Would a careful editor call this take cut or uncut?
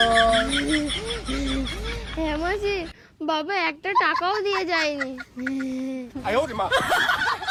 uncut